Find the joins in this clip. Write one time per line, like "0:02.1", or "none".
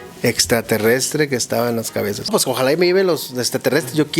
0:02.3